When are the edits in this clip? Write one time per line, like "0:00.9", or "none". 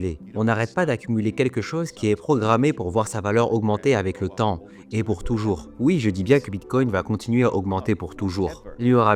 none